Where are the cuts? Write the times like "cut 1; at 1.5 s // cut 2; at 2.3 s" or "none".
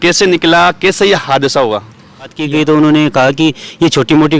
cut 1; at 2.4 s